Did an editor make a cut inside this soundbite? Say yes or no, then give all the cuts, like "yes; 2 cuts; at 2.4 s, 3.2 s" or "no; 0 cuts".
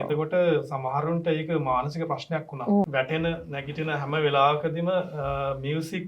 yes; 1 cut; at 2.9 s